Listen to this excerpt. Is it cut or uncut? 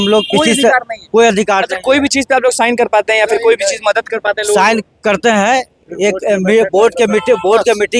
uncut